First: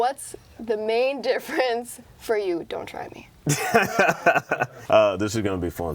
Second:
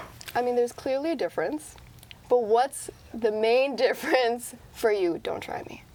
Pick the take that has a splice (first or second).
first